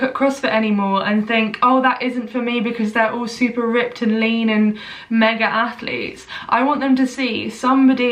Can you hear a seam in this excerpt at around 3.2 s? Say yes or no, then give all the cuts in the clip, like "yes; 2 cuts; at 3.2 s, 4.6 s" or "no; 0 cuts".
no; 0 cuts